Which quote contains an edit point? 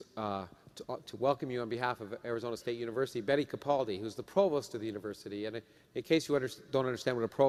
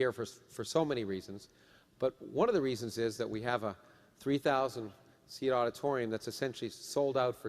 second; 1 cut; at 3.1 s

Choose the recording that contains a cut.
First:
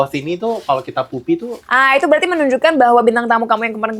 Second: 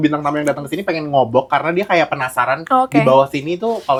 first; 1 cut; at 1.7 s

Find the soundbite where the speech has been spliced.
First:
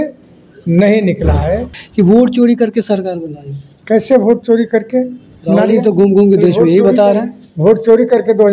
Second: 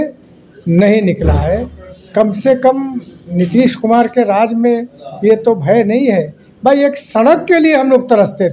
first; 1 cut; at 1.8 s

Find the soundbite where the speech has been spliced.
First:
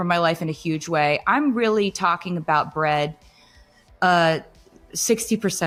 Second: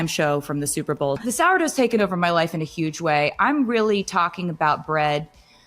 second; 1 cut; at 1.2 s

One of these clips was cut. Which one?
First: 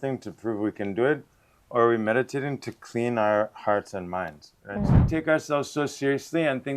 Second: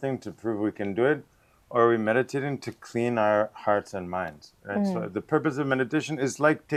first; 1 cut; at 5.0 s

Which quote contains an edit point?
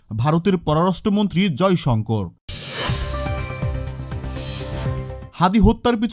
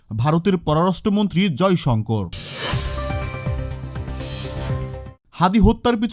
second; 2 cuts; at 2.4 s, 5.2 s

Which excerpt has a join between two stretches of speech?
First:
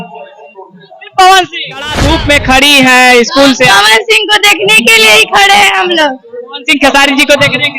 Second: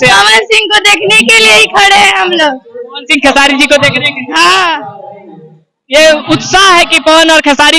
first; 1 cut; at 2.0 s

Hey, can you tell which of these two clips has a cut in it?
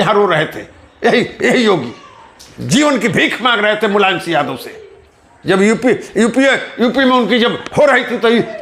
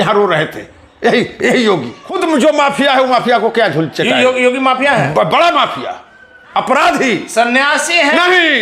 second; 1 cut; at 2.2 s

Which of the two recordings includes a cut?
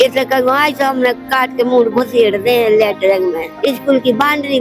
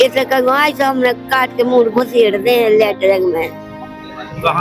first; 1 cut; at 3.5 s

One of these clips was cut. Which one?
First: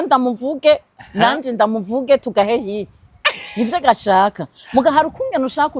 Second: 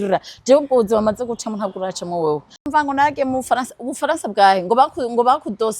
second; 1 cut; at 2.7 s

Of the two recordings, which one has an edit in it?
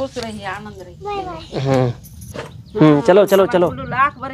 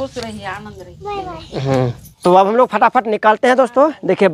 second; 1 cut; at 2.1 s

